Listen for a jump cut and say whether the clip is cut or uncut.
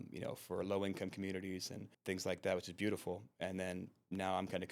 cut